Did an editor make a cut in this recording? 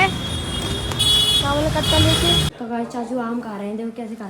yes; 1 cut; at 2.5 s

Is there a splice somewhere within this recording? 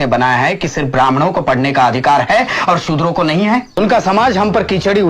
yes; 1 cut; at 3.8 s

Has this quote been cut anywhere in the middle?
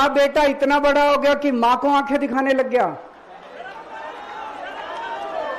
no; 0 cuts

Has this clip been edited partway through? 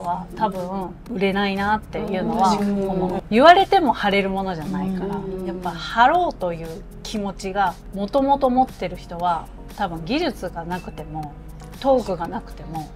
yes; 3 cuts; at 1.1 s, 3.2 s, 7.8 s

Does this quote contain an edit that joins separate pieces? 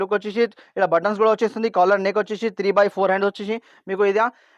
no; 0 cuts

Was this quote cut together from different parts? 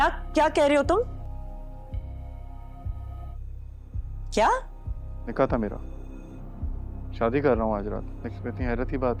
no; 0 cuts

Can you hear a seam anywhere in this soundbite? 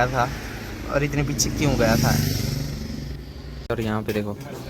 yes; 1 cut; at 3.7 s

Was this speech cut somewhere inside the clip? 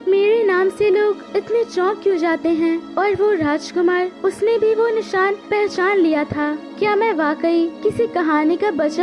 yes; 6 cuts; at 1.2 s, 2.9 s, 4.1 s, 5.4 s, 6.6 s, 7.7 s

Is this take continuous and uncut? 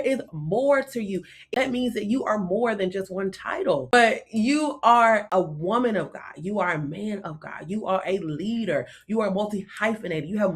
no; 3 cuts; at 1.4 s, 3.9 s, 5.3 s

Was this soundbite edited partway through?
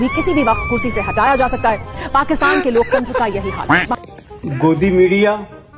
yes; 1 cut; at 3.8 s

